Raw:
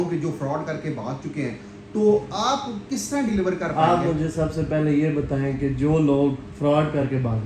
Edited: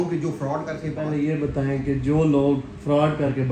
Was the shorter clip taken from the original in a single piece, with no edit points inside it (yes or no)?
no